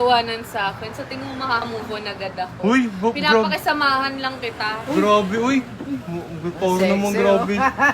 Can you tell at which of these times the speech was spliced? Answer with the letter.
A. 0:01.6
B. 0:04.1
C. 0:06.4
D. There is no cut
A